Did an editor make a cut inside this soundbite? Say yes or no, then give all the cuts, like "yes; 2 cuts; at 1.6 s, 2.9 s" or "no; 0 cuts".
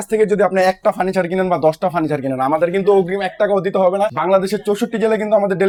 no; 0 cuts